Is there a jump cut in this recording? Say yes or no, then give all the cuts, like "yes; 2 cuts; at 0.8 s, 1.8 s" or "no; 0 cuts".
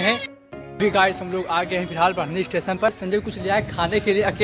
yes; 1 cut; at 3.0 s